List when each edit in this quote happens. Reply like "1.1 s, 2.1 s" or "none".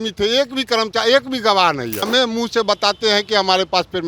2.1 s